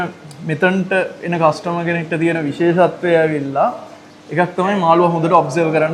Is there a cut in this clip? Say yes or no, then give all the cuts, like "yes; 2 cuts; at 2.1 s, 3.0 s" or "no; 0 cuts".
no; 0 cuts